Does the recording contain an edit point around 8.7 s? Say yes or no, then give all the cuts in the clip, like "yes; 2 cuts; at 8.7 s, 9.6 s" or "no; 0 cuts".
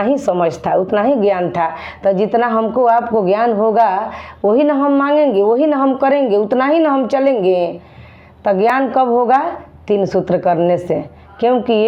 no; 0 cuts